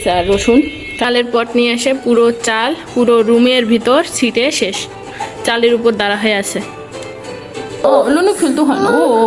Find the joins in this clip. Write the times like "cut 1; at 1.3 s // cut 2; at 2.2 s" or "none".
cut 1; at 1.1 s // cut 2; at 7.8 s

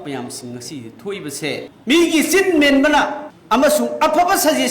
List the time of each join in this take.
cut 1; at 1.7 s

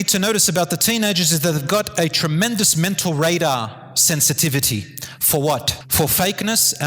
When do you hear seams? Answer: cut 1; at 5.8 s

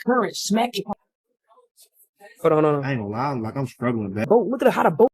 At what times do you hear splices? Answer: cut 1; at 0.9 s // cut 2; at 4.3 s

